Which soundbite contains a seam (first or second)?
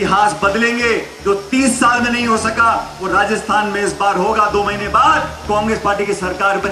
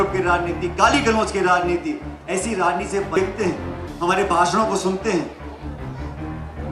second